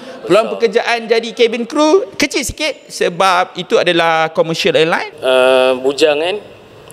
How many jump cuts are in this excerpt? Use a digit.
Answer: 1